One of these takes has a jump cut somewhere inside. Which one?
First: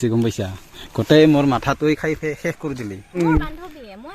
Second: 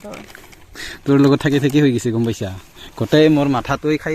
first; 1 cut; at 3.2 s

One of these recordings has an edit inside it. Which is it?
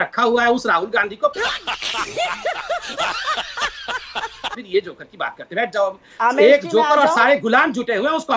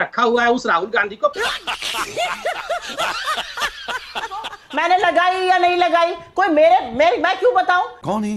second; 1 cut; at 4.6 s

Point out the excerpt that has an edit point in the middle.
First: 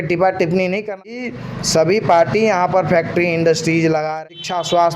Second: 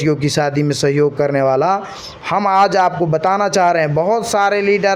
first; 2 cuts; at 1.2 s, 4.1 s

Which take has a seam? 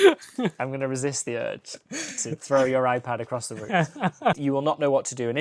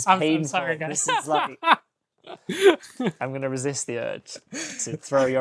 first; 1 cut; at 4.4 s

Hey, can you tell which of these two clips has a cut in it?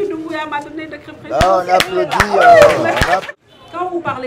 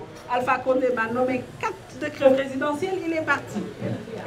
first; 1 cut; at 3.3 s

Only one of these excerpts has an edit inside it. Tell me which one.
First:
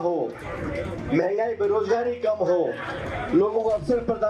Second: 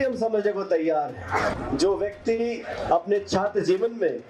second; 1 cut; at 1.6 s

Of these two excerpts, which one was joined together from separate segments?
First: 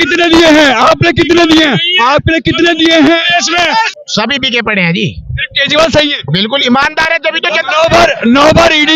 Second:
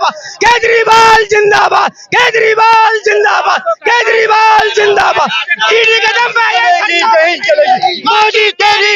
first; 1 cut; at 3.9 s

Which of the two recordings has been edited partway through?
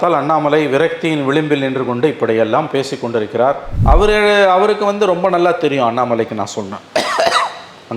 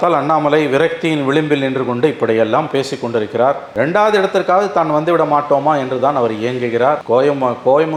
first; 1 cut; at 3.7 s

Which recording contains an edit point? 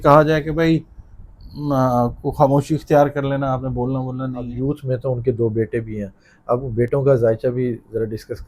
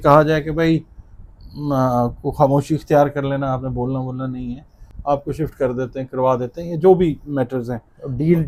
first; 1 cut; at 4.5 s

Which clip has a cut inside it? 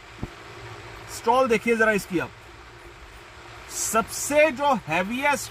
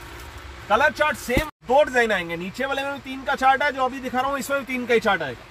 second; 1 cut; at 1.5 s

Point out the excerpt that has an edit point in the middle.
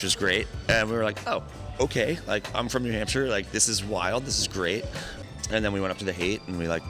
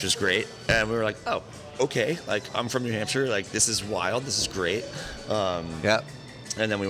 first; 1 cut; at 5.1 s

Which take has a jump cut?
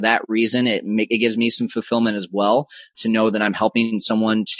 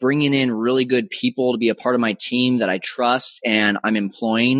first; 1 cut; at 3.0 s

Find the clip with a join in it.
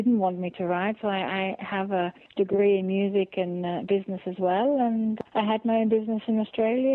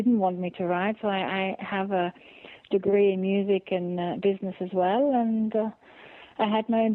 first; 2 cuts; at 2.2 s, 5.2 s

